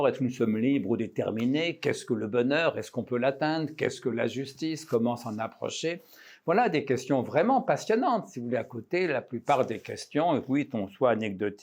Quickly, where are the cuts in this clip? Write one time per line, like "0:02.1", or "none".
none

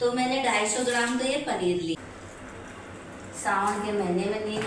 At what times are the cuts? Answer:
0:02.0

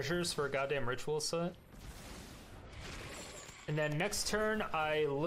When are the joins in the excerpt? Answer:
0:02.5

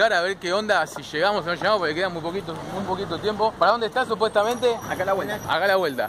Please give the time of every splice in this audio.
0:03.5

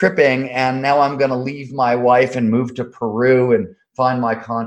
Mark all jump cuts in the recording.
none

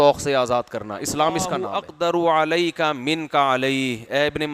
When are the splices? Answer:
0:01.8

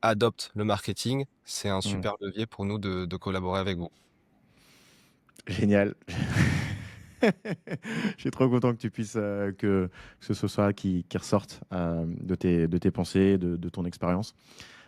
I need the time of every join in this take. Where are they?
none

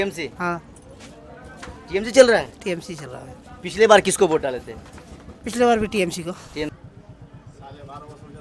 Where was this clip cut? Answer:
0:06.7

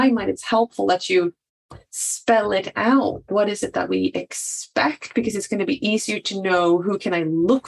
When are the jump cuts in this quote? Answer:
0:03.2

